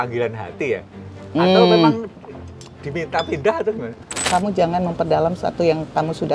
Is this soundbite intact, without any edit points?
no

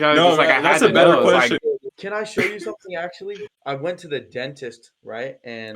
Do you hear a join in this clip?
yes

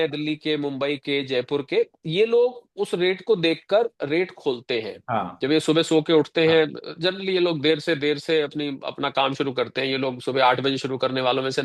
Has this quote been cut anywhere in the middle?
no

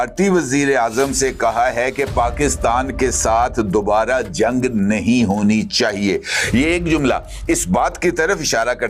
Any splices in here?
no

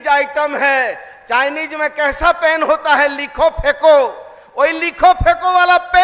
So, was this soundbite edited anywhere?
no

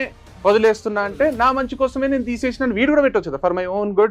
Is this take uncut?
yes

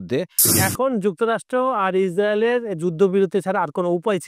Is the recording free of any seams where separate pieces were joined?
yes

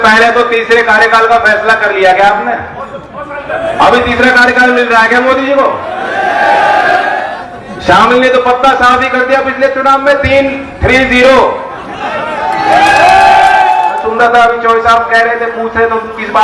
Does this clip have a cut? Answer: yes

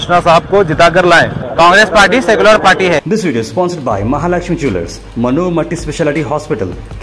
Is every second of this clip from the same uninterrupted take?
no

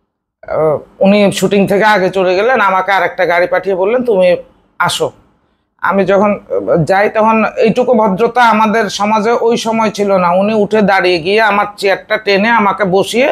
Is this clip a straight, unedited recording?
yes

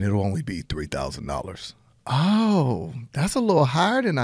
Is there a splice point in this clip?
no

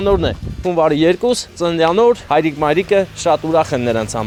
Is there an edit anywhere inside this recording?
no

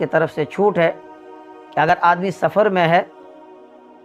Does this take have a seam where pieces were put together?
no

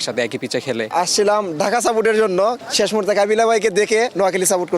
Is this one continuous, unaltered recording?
no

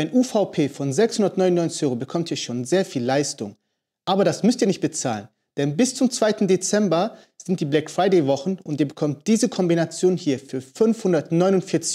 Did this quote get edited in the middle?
no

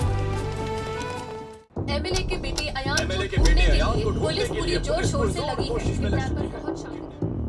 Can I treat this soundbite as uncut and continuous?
no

